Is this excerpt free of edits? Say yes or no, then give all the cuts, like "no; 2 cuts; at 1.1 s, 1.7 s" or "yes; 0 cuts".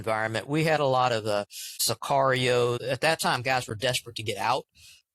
no; 2 cuts; at 1.7 s, 2.8 s